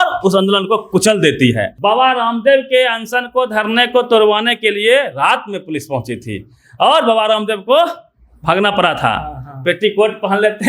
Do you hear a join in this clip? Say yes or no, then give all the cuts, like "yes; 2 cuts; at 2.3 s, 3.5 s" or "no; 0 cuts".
yes; 1 cut; at 1.7 s